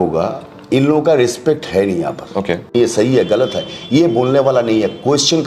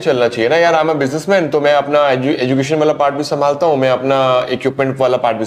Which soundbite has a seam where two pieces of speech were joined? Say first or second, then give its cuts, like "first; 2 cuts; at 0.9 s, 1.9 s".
first; 1 cut; at 2.7 s